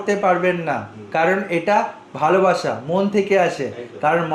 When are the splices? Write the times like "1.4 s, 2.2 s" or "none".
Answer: none